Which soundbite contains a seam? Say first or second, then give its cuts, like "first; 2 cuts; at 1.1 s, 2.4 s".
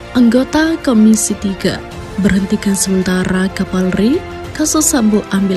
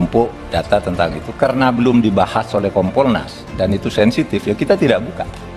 second; 1 cut; at 2.8 s